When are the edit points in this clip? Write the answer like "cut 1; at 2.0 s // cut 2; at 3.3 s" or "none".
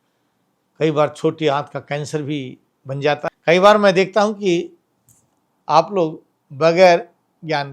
cut 1; at 3.3 s